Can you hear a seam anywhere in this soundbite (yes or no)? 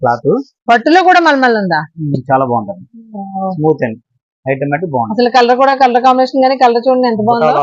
no